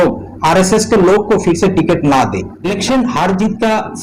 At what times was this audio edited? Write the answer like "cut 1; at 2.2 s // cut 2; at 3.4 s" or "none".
cut 1; at 2.5 s